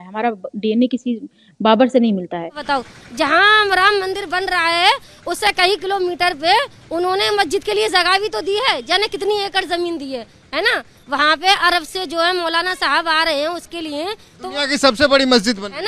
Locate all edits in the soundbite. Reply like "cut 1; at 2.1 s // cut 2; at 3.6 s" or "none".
cut 1; at 2.6 s

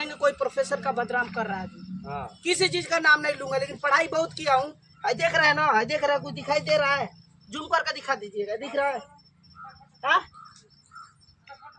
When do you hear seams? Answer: none

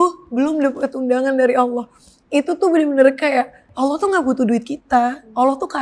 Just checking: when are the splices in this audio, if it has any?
cut 1; at 3.6 s

